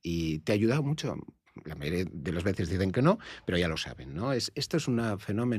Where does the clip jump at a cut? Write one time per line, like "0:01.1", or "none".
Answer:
none